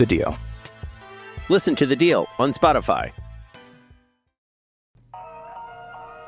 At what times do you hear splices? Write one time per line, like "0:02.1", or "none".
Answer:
0:04.9